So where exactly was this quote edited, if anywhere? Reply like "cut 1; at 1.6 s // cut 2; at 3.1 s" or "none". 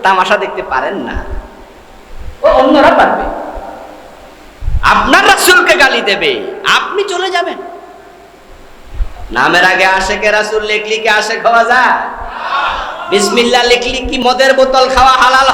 cut 1; at 14.2 s